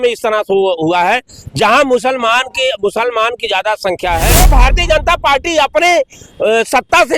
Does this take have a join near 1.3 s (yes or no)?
no